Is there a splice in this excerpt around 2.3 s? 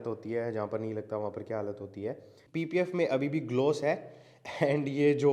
yes; 1 cut; at 2.3 s

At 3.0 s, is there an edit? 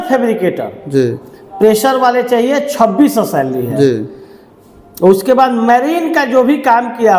no; 0 cuts

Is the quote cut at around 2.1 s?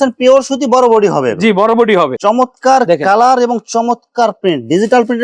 yes; 1 cut; at 2.1 s

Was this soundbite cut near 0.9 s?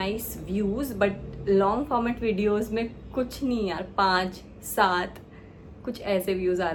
no; 0 cuts

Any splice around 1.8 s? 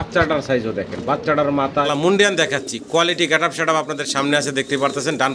yes; 1 cut; at 1.8 s

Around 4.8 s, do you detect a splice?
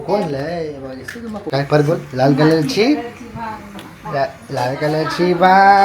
no; 1 cut; at 1.5 s

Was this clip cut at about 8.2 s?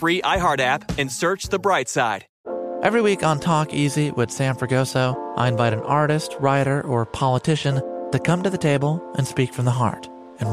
no; 1 cut; at 2.3 s

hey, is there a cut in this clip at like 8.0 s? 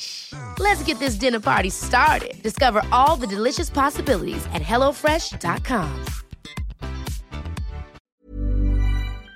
yes; 1 cut; at 8.0 s

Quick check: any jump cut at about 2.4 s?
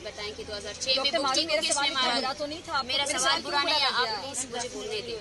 no; 0 cuts

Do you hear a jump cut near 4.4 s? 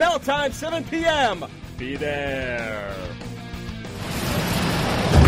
yes; 1 cut; at 4.4 s

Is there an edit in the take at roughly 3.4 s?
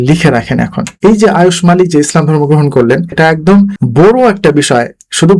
yes; 2 cuts; at 0.9 s, 3.4 s

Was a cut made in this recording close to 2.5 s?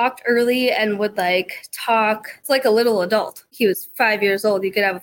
yes; 2 cuts; at 2.5 s, 3.4 s

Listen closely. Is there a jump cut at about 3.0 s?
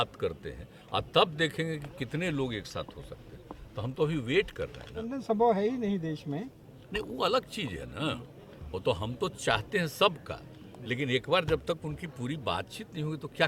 no; 1 cut; at 5.1 s

